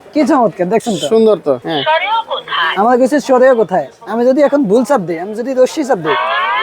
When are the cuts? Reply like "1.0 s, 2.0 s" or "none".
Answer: 1.6 s